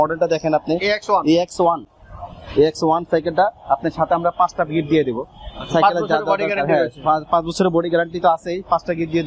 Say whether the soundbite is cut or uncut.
uncut